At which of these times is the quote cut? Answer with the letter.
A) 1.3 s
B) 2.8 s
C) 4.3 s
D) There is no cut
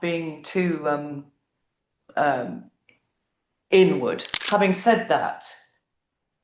C